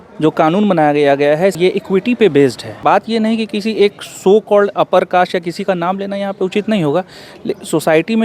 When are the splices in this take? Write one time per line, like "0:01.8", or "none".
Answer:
0:01.5
0:02.8